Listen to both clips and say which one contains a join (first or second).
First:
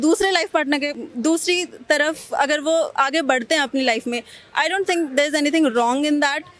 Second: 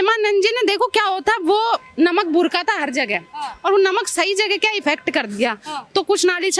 first